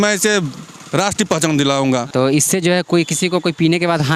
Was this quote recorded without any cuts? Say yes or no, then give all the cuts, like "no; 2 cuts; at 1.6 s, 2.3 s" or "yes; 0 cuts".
no; 1 cut; at 2.1 s